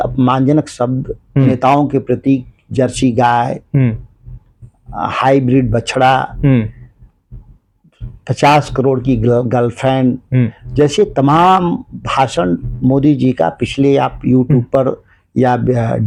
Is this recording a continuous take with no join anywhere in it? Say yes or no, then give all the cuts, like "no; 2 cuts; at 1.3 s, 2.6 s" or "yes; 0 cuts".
yes; 0 cuts